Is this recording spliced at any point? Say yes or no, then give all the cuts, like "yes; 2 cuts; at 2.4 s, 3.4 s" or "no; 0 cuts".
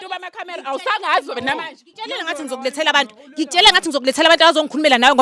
yes; 1 cut; at 1.9 s